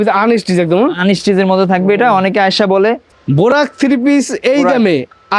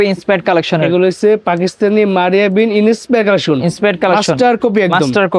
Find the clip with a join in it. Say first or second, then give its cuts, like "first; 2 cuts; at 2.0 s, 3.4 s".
first; 1 cut; at 3.1 s